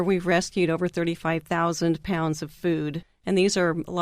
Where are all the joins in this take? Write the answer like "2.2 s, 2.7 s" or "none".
3.1 s